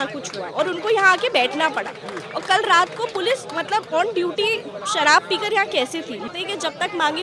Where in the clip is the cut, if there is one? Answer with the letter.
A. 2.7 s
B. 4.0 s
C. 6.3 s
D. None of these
C